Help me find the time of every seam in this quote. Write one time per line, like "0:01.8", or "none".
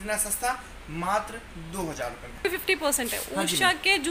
0:02.4